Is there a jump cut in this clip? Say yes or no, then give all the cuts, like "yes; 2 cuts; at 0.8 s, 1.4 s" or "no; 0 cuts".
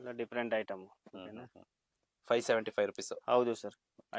no; 0 cuts